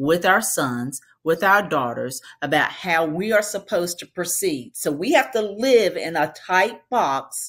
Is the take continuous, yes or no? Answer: yes